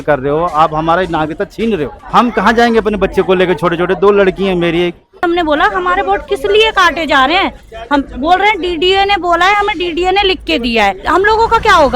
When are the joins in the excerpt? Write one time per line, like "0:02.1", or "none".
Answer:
0:02.0
0:05.2
0:11.0